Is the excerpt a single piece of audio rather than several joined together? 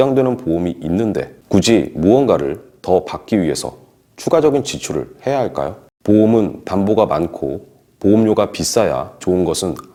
yes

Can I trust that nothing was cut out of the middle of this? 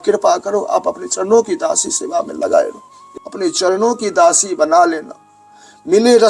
no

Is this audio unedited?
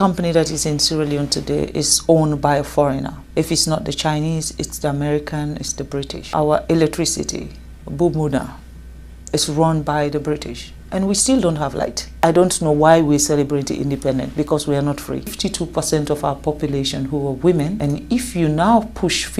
no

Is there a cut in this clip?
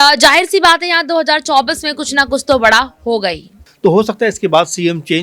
yes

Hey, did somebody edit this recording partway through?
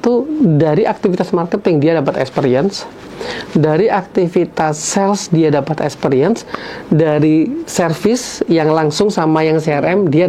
no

